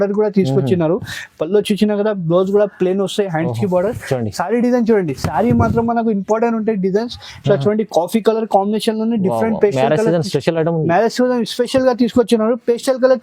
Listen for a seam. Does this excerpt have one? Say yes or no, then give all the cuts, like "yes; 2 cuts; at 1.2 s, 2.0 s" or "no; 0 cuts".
no; 0 cuts